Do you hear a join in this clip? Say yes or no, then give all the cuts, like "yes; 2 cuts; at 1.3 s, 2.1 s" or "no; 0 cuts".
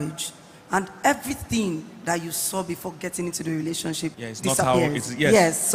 yes; 1 cut; at 4.3 s